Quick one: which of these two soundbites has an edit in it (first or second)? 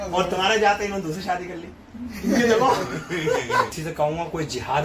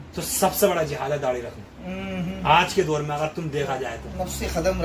first